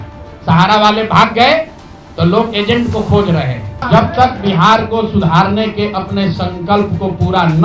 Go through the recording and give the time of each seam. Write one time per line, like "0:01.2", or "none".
0:03.8